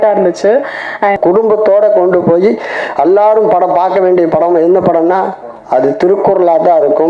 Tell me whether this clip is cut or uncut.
cut